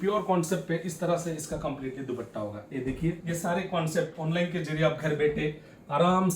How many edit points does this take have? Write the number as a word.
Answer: one